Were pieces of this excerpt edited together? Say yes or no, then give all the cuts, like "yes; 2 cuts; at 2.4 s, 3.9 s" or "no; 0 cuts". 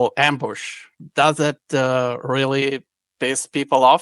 no; 0 cuts